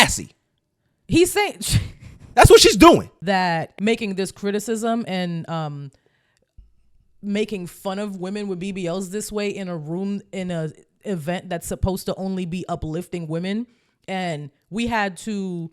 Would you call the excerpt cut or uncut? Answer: cut